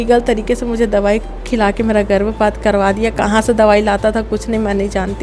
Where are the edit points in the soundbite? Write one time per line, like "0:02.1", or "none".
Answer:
none